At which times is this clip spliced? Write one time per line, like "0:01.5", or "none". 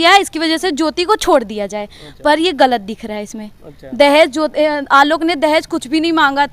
none